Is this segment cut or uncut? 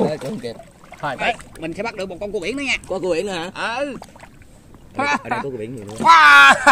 cut